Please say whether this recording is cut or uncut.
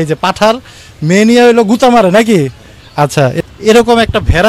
cut